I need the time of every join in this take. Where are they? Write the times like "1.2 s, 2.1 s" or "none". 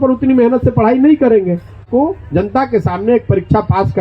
1.8 s